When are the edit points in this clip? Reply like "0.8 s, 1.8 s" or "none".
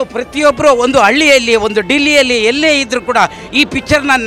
none